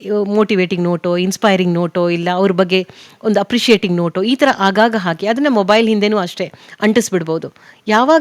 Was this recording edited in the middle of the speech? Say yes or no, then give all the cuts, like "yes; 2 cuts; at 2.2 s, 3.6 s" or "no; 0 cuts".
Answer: no; 0 cuts